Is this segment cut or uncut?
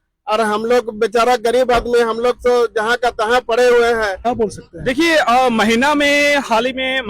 cut